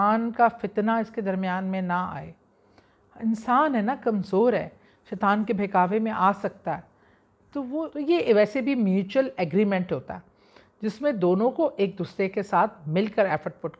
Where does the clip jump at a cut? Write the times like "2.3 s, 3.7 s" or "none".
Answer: 7.8 s